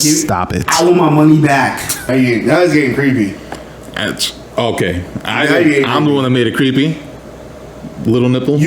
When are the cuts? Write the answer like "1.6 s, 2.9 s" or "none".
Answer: 2.1 s